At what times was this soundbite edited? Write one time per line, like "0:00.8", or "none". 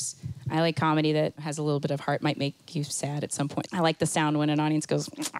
0:01.5
0:03.6